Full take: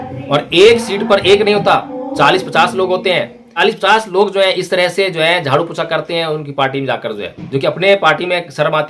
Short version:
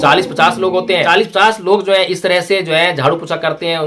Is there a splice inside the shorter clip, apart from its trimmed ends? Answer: yes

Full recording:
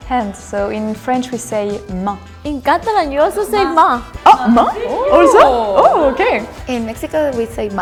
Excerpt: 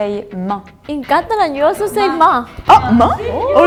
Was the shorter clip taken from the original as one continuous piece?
yes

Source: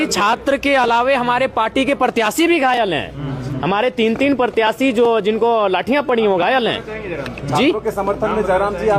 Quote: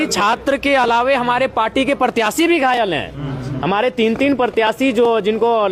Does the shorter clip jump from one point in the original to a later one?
no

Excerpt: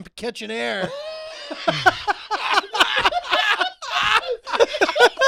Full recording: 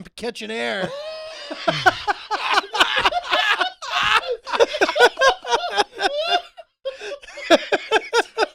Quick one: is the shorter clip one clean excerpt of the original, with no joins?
yes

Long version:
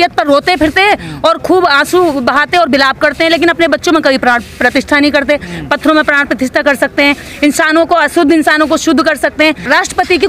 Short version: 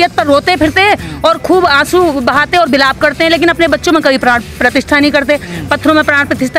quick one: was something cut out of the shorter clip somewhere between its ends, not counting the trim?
no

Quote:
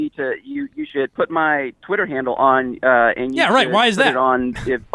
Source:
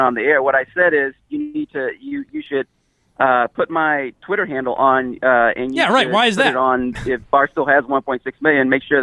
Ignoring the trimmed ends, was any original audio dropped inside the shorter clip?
yes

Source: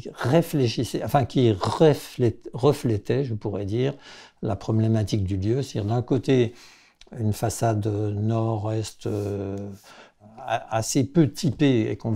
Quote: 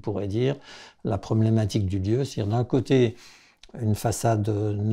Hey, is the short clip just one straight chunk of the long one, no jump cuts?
yes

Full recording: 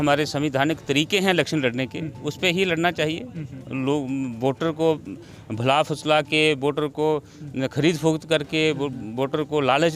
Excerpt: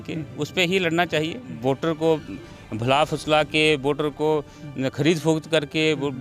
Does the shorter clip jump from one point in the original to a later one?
yes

